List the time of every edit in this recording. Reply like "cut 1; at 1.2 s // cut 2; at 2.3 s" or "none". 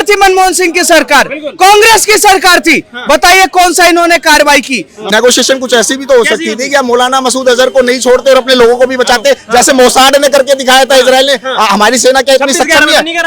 cut 1; at 4.9 s